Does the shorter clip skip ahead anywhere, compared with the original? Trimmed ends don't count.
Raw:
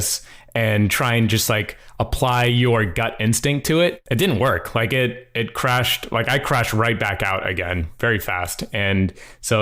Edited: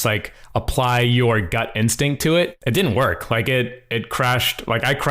no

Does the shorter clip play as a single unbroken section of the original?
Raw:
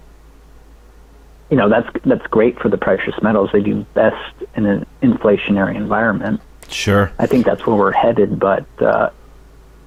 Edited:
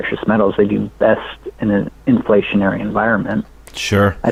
yes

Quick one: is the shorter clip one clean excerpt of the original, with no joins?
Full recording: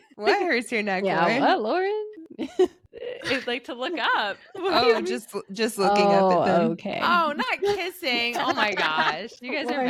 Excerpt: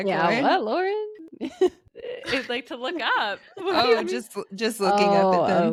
yes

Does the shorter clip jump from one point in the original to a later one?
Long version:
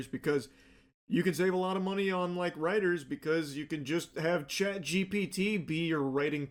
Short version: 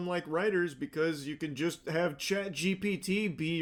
no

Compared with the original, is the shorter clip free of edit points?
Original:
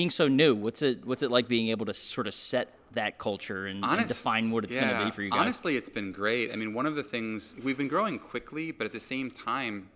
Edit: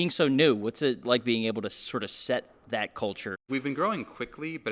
no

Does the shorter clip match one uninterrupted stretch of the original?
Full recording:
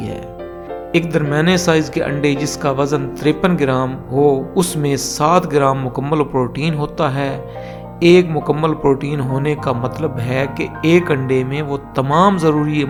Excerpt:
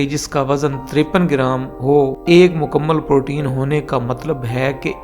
no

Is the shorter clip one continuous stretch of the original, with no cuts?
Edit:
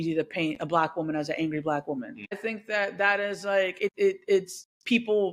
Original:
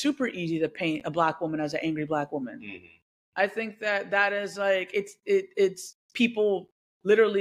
no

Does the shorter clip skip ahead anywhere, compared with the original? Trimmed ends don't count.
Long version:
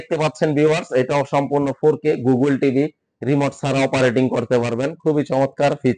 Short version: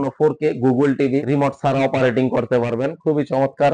yes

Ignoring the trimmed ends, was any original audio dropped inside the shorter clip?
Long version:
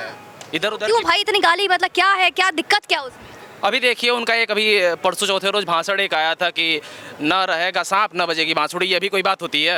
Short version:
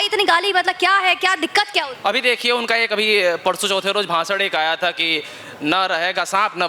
yes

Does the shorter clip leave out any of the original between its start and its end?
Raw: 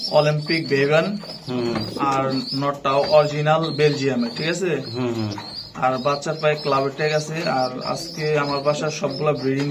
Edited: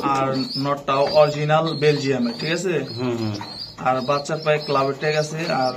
no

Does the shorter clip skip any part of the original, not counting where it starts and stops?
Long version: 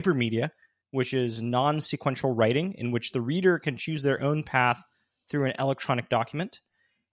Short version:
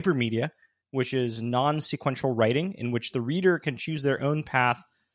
no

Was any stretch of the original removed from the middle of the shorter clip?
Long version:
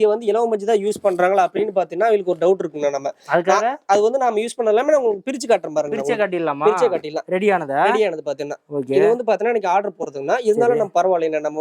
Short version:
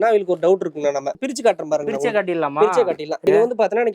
yes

